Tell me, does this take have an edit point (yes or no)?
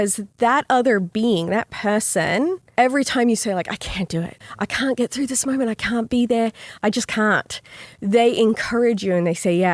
yes